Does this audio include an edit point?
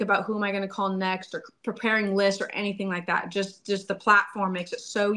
no; 0 cuts

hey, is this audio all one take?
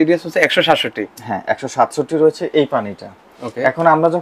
yes; 0 cuts

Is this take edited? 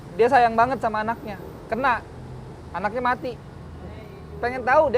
no; 0 cuts

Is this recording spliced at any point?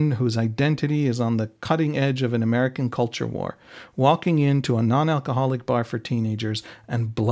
no; 0 cuts

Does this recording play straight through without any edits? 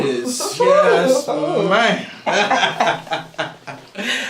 no; 1 cut; at 2.3 s

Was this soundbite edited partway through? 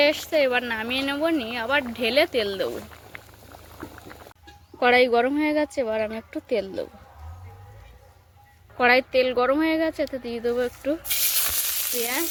no; 0 cuts

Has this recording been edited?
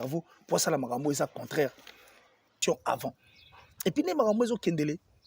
yes; 1 cut; at 2.6 s

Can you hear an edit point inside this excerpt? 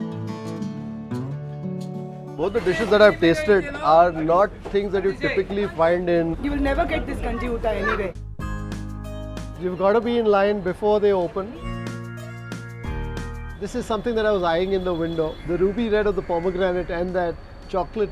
yes; 2 cuts; at 8.3 s, 11.6 s

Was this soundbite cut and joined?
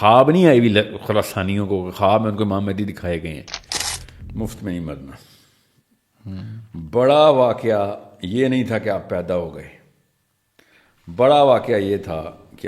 yes; 1 cut; at 3.8 s

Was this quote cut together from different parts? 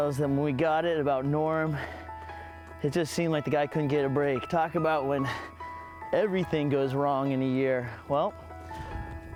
no; 0 cuts

